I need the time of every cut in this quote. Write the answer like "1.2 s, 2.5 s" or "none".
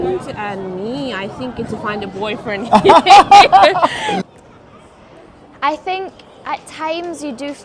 4.2 s

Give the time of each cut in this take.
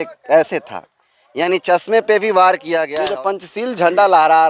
3.0 s

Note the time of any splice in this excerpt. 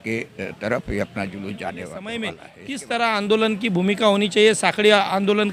2.0 s

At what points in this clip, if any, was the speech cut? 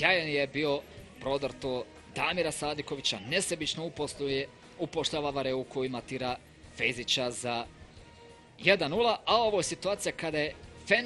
4.2 s

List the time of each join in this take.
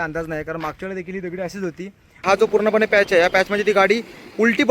2.2 s

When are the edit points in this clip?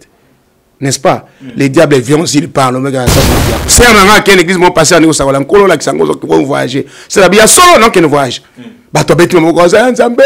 3.6 s

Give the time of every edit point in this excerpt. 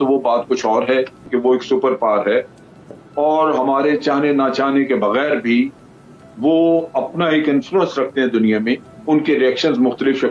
1.3 s

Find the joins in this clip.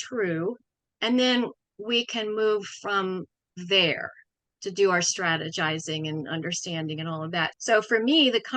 7.5 s

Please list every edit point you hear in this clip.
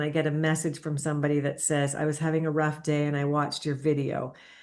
none

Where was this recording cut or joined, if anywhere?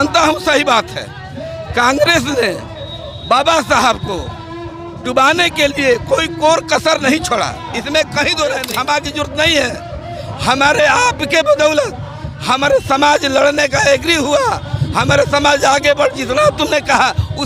8.7 s

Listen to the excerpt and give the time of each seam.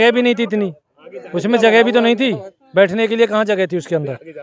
none

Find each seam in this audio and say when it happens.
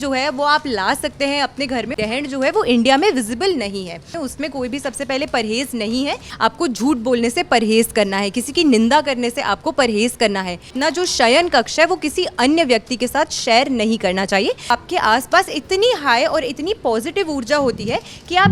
1.9 s, 4.2 s, 6.3 s, 10.7 s, 14.7 s

